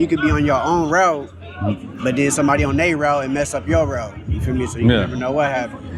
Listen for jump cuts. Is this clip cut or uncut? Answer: uncut